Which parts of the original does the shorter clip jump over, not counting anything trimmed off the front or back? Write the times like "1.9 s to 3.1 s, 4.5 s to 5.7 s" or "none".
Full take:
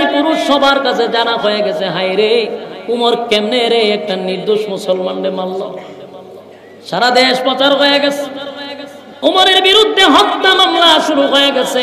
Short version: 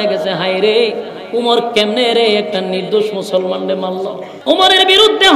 5.8 s to 9.0 s